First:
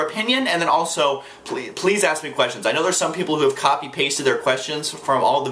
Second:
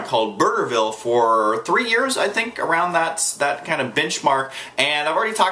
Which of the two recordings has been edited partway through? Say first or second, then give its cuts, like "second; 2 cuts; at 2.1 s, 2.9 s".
second; 1 cut; at 3.3 s